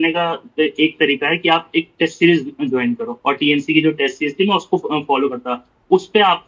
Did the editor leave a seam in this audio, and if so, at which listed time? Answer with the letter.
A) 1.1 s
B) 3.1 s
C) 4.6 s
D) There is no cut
B